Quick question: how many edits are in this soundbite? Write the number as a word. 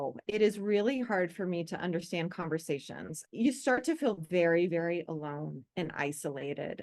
one